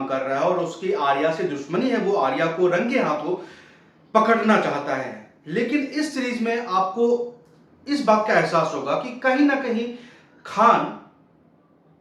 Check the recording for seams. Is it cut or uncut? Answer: uncut